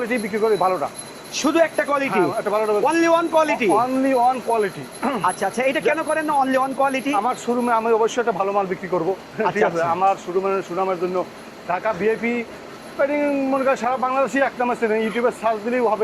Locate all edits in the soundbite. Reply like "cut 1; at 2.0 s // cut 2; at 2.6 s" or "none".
none